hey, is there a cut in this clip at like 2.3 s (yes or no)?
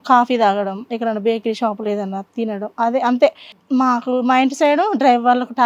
no